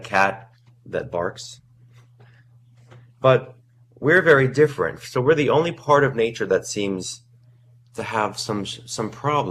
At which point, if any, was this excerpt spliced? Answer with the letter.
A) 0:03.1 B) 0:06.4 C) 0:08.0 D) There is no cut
A